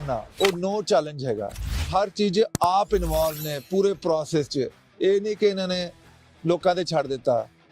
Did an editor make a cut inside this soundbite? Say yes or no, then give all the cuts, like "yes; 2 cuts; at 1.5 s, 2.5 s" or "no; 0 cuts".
yes; 1 cut; at 1.9 s